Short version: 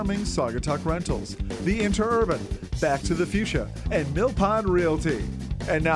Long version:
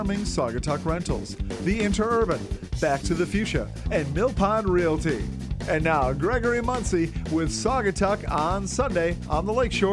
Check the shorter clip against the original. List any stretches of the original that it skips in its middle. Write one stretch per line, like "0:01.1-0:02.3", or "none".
none